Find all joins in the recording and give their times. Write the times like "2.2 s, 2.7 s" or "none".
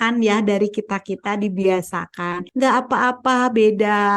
2.4 s